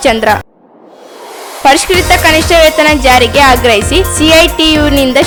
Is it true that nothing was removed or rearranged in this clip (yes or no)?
yes